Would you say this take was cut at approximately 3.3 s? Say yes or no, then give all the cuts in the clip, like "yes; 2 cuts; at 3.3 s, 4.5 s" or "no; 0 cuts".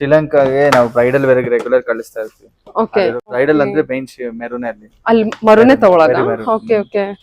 yes; 1 cut; at 3.3 s